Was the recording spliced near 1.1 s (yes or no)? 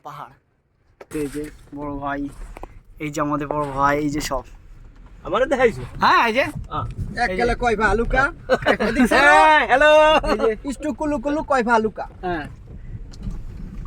yes